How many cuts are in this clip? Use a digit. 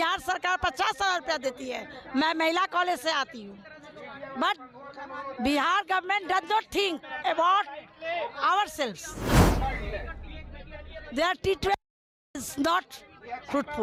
0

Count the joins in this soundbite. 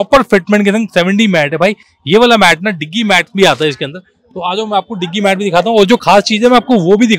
0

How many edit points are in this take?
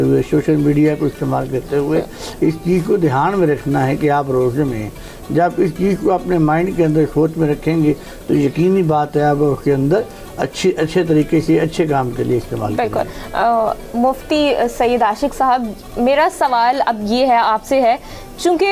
0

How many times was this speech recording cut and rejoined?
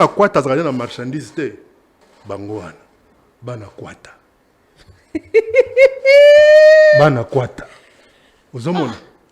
1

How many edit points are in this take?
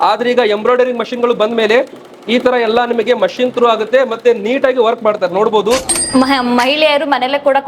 1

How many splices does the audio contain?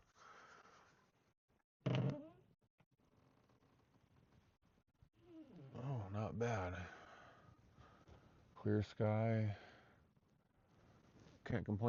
0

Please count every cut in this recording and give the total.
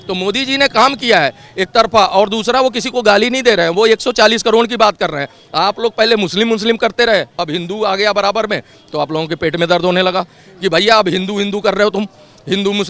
0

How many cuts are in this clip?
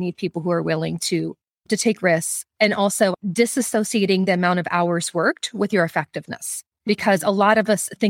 1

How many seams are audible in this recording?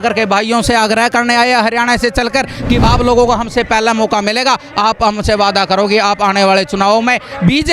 1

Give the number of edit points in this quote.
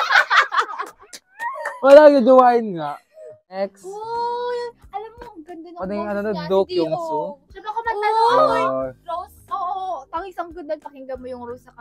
1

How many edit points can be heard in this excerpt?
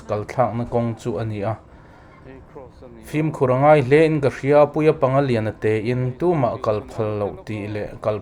0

